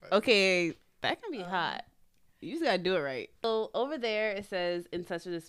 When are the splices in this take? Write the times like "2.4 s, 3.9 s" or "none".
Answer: 3.4 s

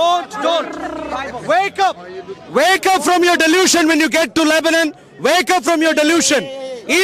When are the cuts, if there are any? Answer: none

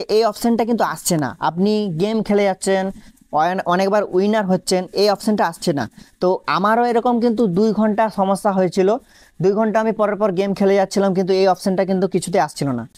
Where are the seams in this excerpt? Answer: none

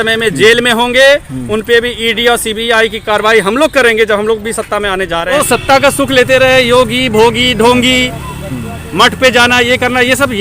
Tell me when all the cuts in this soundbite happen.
5.3 s

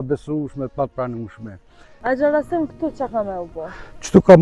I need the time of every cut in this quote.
1.9 s

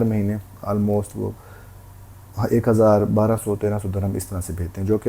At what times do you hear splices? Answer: none

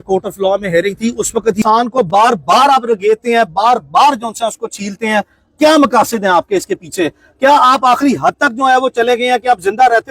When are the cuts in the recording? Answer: 1.6 s

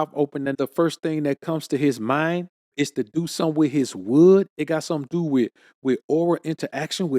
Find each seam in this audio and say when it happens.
2.6 s

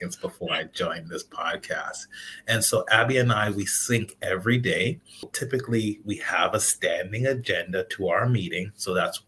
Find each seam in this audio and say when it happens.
5.3 s

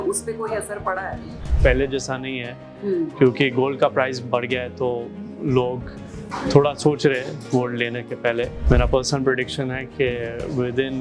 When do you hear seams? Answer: 1.4 s, 8.6 s

